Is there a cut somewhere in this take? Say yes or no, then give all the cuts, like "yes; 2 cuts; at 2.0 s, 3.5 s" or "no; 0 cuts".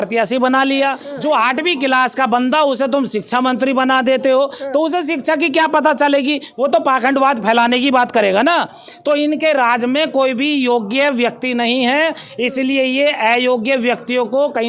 yes; 1 cut; at 1.1 s